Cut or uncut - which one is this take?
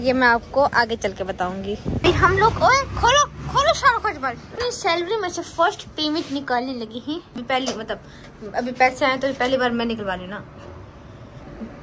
uncut